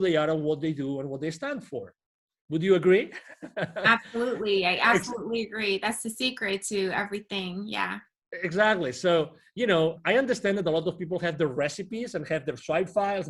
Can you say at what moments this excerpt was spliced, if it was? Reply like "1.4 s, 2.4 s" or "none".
none